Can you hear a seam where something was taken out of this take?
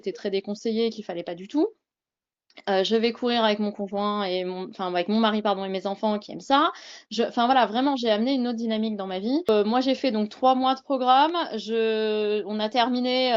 yes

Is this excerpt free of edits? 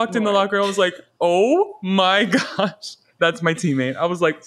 no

